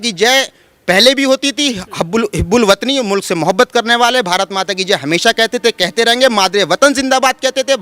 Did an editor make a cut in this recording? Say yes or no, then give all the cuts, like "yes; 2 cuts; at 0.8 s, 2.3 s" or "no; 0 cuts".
no; 0 cuts